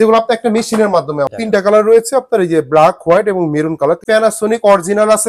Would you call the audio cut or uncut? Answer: cut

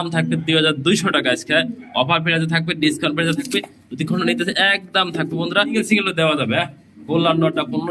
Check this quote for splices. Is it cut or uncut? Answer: cut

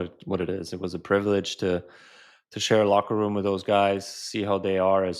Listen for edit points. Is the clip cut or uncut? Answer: uncut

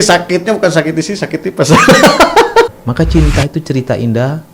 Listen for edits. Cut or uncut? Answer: cut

